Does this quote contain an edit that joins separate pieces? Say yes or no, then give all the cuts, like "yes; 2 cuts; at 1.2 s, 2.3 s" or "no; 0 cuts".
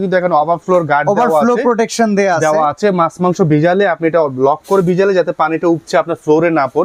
no; 0 cuts